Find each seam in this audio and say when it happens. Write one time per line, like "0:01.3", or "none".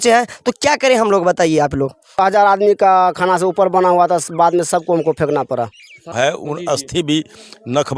0:02.2
0:06.0